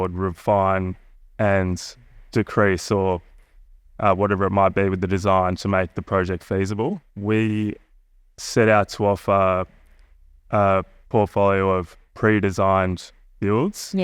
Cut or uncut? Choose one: cut